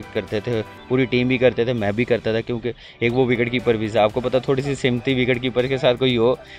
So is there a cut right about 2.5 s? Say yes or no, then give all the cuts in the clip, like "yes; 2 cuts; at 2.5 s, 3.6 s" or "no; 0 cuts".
no; 0 cuts